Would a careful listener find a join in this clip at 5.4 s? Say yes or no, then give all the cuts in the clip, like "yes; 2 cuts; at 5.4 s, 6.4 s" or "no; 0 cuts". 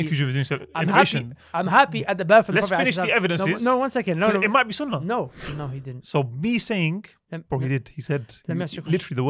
yes; 1 cut; at 5.4 s